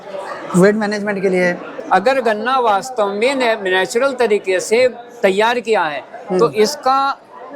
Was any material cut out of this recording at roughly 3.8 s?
no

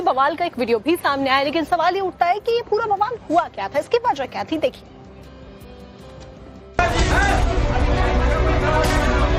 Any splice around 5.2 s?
yes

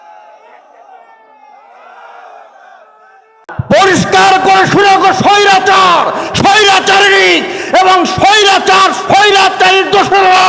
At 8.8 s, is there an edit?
no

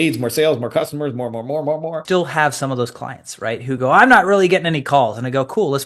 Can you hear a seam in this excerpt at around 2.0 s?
yes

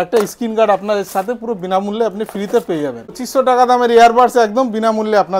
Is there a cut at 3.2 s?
yes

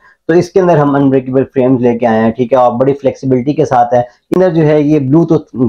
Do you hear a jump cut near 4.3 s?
yes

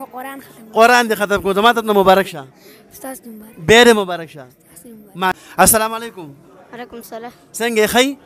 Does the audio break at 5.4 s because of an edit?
yes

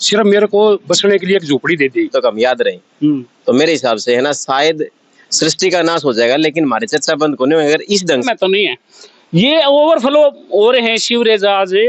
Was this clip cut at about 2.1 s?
yes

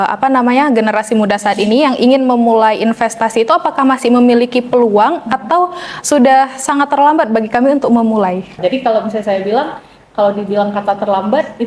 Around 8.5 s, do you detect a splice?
yes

